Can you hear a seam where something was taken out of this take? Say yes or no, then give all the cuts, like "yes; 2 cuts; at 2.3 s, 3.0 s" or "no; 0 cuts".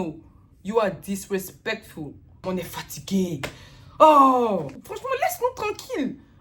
yes; 2 cuts; at 2.4 s, 5.0 s